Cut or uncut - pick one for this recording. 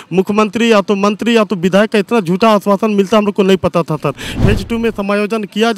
cut